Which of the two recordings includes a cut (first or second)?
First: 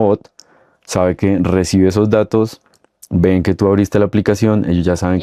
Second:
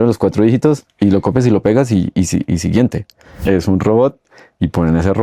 second